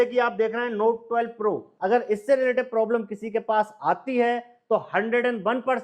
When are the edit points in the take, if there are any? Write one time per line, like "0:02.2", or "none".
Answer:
0:01.7